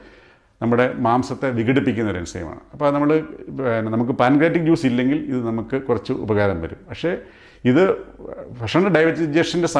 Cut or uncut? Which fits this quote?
uncut